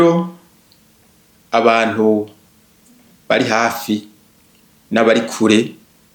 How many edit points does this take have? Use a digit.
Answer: 0